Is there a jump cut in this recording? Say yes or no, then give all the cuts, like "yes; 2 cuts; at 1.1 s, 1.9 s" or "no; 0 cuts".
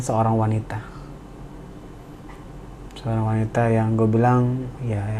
no; 0 cuts